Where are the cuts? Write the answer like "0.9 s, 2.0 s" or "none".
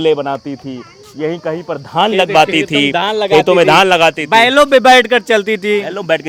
none